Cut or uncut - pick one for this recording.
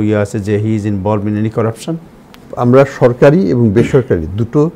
cut